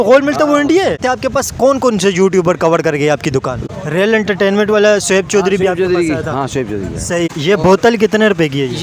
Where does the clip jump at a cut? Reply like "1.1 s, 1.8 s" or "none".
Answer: 1.0 s, 3.7 s, 7.3 s

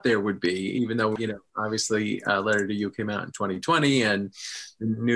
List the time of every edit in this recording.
1.2 s

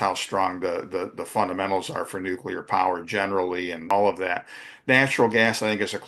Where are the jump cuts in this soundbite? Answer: 3.9 s

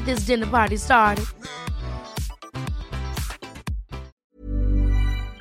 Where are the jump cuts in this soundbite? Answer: 4.2 s

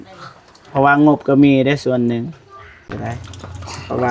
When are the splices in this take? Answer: 2.9 s

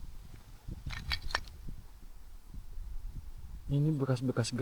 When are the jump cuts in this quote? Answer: none

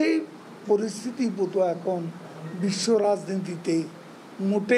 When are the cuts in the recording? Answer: none

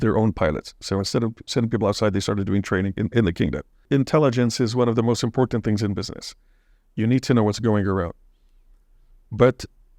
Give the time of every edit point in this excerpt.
3.8 s

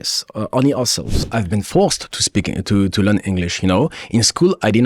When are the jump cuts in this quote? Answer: 1.3 s

